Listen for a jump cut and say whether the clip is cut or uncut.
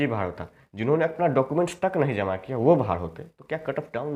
uncut